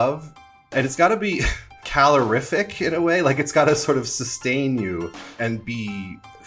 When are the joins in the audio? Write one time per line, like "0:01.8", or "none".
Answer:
0:00.7
0:01.8